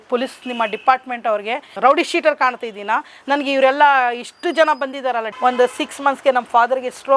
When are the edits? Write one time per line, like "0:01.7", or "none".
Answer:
0:01.7
0:05.3